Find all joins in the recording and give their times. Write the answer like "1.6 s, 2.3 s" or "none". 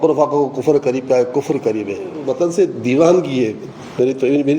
2.2 s